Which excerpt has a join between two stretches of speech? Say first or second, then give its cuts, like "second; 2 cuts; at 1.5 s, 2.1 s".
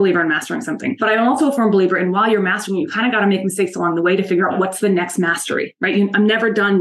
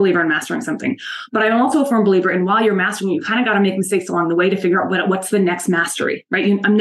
first; 2 cuts; at 0.9 s, 4.5 s